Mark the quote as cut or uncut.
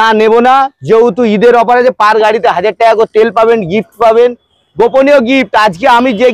uncut